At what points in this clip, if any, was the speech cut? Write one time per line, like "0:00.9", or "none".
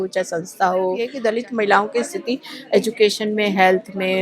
0:01.1